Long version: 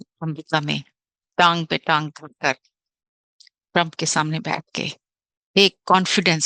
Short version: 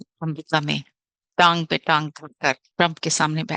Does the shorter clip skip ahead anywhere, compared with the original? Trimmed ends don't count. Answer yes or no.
yes